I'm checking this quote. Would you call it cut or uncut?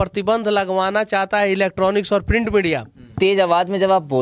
cut